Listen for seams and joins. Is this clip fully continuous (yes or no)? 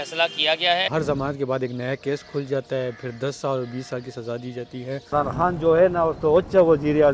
no